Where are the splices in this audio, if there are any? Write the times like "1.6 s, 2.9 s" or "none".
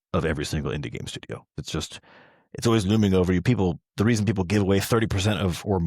1.5 s

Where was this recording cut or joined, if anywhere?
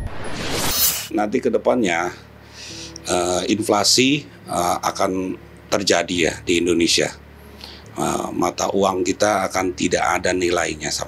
1.1 s

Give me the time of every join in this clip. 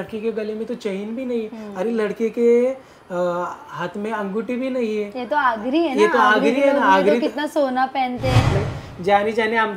8.5 s

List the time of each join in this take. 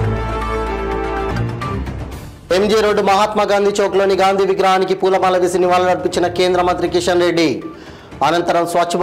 1.2 s

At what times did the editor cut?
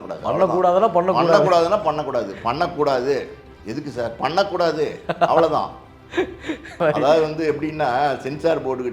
6.8 s

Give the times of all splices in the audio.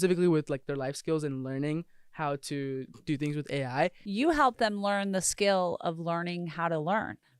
4.0 s

